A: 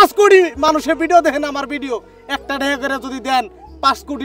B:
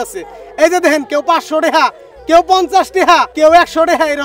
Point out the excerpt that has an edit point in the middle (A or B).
B